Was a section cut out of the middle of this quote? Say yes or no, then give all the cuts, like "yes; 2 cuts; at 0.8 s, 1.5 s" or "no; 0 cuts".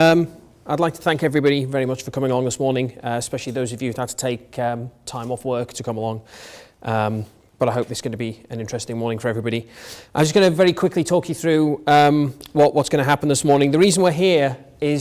no; 0 cuts